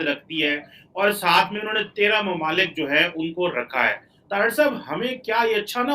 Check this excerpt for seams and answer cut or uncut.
cut